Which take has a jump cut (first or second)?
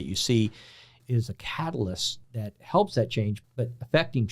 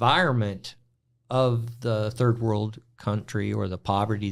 first